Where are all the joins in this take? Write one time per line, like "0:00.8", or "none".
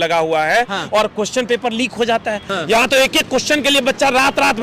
0:02.5